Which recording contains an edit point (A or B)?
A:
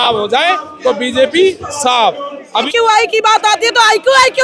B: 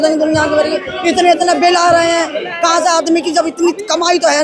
A